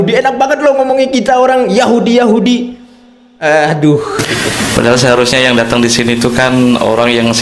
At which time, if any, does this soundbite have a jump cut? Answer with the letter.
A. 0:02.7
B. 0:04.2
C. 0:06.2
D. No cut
B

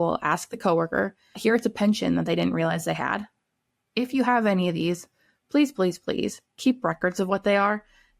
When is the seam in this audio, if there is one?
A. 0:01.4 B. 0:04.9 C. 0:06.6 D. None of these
A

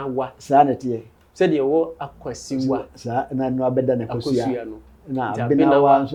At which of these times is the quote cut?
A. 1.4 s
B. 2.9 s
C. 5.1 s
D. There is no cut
D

